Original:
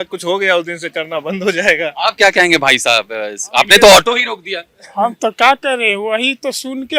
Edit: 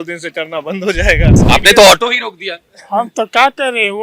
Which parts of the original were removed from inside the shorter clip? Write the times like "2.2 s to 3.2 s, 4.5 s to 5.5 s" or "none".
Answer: 1.9 s to 3.4 s